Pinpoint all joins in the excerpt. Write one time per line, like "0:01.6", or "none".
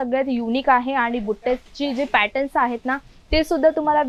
none